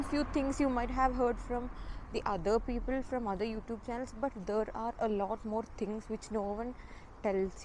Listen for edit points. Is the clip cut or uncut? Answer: uncut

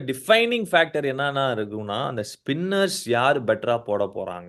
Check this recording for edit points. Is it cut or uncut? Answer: uncut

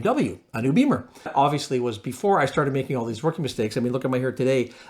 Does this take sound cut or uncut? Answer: cut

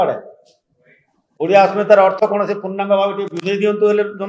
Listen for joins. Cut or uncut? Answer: uncut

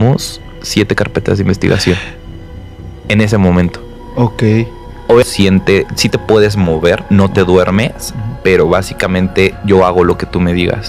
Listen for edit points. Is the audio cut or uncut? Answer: cut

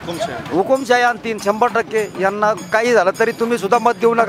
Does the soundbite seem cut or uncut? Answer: uncut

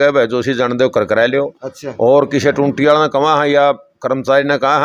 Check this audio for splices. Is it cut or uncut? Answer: uncut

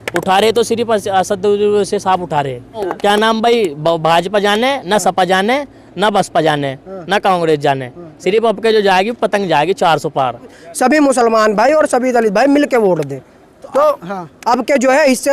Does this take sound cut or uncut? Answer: cut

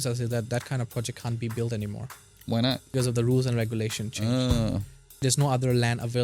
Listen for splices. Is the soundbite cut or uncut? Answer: cut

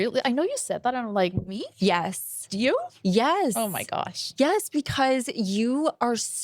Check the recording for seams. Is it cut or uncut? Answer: uncut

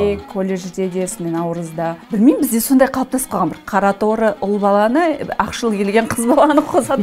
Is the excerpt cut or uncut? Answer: cut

